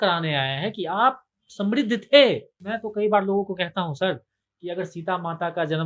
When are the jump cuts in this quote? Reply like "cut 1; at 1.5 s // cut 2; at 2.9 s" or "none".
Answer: cut 1; at 2.7 s